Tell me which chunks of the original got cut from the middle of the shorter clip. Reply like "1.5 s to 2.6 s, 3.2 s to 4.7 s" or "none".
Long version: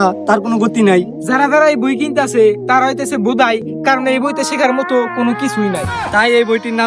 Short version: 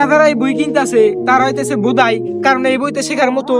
none